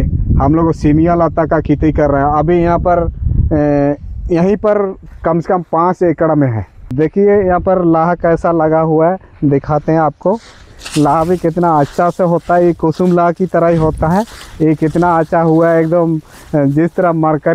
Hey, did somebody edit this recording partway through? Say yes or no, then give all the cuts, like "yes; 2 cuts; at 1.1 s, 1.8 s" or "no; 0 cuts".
yes; 1 cut; at 6.9 s